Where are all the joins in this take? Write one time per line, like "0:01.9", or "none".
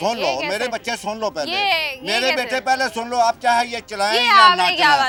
none